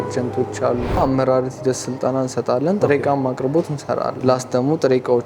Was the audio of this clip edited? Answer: yes; 2 cuts; at 1.0 s, 4.1 s

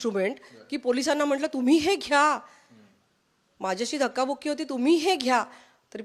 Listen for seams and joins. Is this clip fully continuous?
yes; 0 cuts

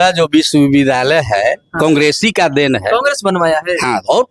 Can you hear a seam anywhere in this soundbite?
no; 0 cuts

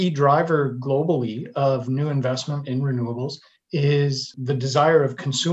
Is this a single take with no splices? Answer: no; 2 cuts; at 3.5 s, 4.3 s

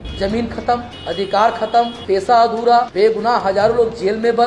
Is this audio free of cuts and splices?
no; 3 cuts; at 0.9 s, 2.0 s, 2.9 s

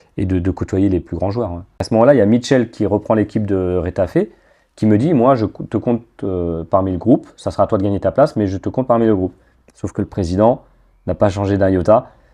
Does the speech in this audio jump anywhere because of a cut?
yes; 1 cut; at 1.9 s

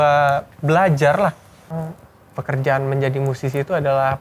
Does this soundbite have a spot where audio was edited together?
yes; 1 cut; at 1.8 s

